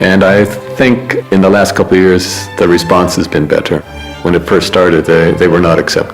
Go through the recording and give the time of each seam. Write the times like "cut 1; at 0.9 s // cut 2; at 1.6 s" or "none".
cut 1; at 1.1 s // cut 2; at 4.2 s